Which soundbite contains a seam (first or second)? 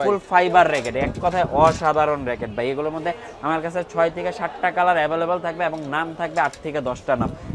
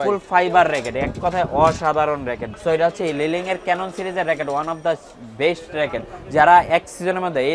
second